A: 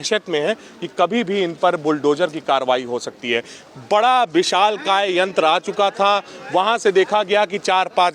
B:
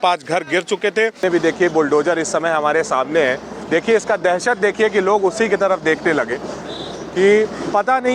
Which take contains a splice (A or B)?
B